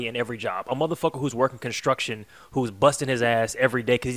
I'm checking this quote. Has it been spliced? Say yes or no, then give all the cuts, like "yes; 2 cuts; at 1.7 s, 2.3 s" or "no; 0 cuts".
no; 0 cuts